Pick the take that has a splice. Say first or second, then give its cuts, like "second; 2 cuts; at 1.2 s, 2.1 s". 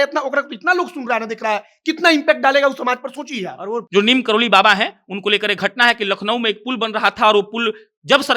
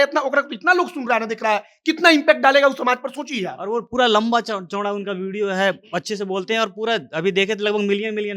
first; 1 cut; at 3.8 s